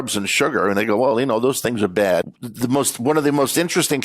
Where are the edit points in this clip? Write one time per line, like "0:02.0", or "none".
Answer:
0:02.2